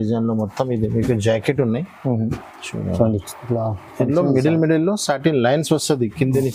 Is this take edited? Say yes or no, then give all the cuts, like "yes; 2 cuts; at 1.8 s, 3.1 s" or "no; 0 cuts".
no; 0 cuts